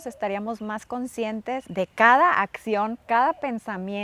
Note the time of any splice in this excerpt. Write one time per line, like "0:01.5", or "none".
0:01.7